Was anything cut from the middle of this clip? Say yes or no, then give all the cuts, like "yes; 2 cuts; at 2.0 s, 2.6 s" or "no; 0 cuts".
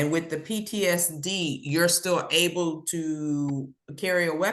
no; 0 cuts